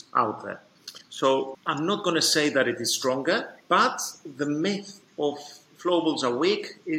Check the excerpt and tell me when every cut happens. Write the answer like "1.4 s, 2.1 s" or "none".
1.5 s